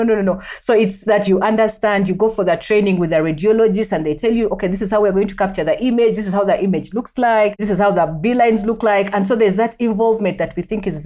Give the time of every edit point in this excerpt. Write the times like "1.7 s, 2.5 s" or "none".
1.3 s, 7.6 s